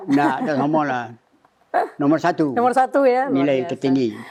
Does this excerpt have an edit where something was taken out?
no; 0 cuts

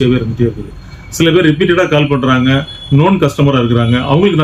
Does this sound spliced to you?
no; 0 cuts

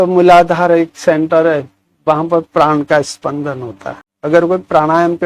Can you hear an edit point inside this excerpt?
no; 0 cuts

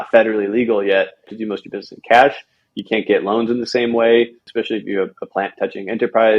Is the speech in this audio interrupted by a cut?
yes; 2 cuts; at 1.4 s, 4.4 s

